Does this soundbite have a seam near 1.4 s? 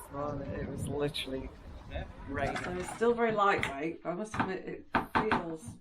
no; 1 cut; at 2.7 s

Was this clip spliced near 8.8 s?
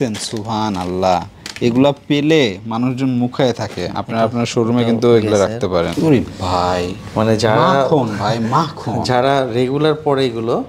no; 1 cut; at 5.9 s

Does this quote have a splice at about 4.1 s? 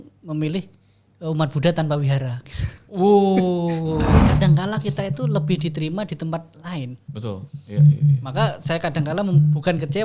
yes; 1 cut; at 4.1 s

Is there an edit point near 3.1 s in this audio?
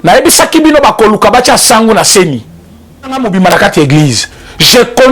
yes; 1 cut; at 3.1 s

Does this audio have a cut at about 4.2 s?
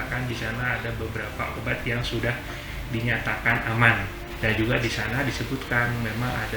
yes; 1 cut; at 4.2 s

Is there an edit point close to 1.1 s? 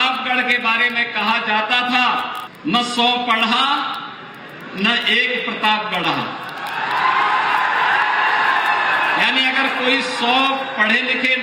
no; 1 cut; at 2.4 s

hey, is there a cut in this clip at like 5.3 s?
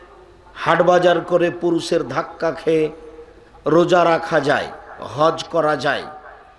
no; 0 cuts

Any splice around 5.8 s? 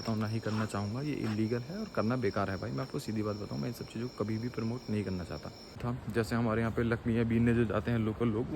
yes; 1 cut; at 5.8 s

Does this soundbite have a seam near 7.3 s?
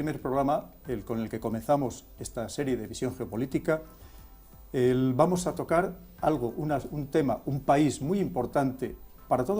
no; 1 cut; at 2.0 s

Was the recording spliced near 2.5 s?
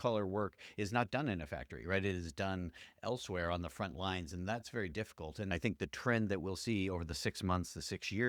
no; 1 cut; at 5.5 s

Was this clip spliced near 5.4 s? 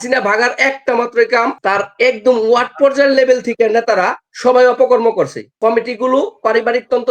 yes; 2 cuts; at 1.6 s, 5.4 s

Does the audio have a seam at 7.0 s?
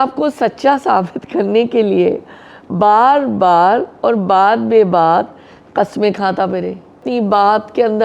yes; 1 cut; at 7.0 s

